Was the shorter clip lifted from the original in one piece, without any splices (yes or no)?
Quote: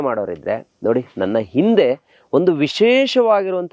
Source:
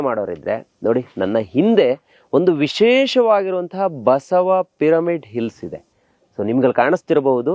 yes